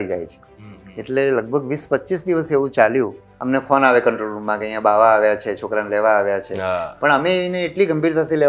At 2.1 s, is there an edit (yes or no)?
no